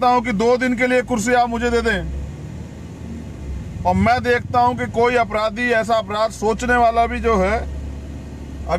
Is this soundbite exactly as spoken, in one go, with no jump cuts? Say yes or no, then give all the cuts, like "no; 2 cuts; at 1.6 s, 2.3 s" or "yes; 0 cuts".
yes; 0 cuts